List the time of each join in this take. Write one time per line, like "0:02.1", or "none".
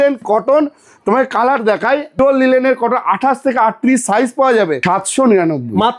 0:02.2
0:04.8